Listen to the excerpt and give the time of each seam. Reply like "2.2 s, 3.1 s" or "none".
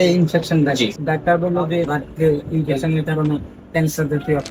1.0 s, 1.9 s